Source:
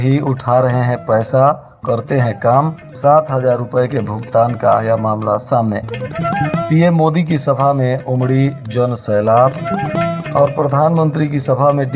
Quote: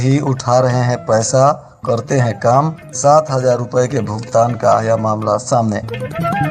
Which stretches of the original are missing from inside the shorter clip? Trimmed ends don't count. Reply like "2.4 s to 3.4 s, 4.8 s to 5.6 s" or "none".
none